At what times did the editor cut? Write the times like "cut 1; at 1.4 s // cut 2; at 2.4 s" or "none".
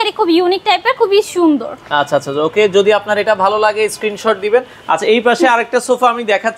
none